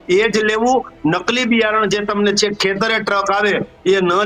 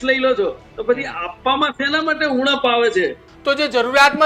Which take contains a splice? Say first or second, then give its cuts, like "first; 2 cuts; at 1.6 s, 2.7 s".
second; 1 cut; at 3.3 s